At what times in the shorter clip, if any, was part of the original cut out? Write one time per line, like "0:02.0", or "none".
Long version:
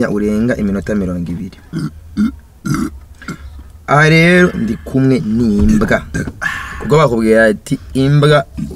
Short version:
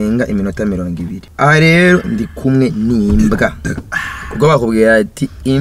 0:01.2